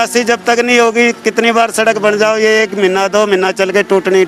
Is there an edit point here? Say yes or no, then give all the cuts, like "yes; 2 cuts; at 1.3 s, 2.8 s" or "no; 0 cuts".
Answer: no; 0 cuts